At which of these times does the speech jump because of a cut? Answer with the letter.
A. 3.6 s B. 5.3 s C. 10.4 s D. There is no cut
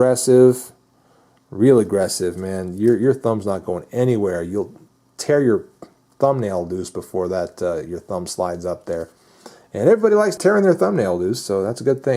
C